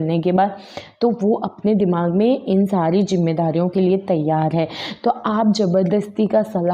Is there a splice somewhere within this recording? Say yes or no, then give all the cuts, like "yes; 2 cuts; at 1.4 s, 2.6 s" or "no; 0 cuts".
no; 0 cuts